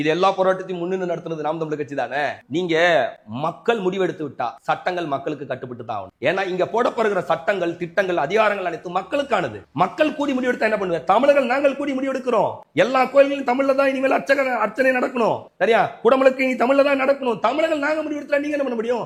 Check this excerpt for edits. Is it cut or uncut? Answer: uncut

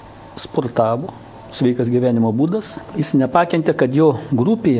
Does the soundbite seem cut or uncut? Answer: cut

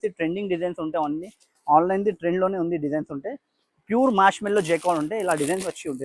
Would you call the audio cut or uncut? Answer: uncut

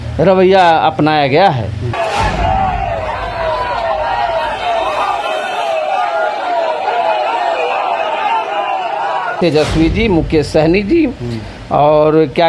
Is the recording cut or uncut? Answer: cut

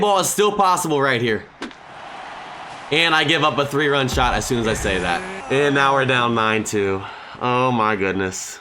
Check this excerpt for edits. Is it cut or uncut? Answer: uncut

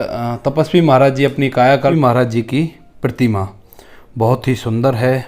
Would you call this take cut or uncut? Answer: cut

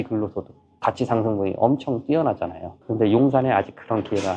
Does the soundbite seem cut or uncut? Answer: cut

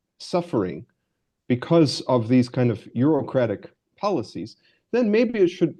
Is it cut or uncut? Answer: uncut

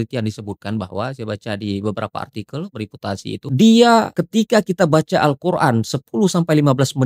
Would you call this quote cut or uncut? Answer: cut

